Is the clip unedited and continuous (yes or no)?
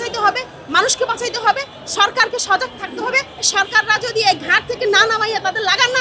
no